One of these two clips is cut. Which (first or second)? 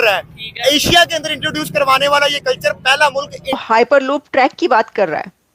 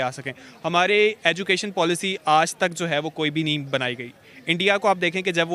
first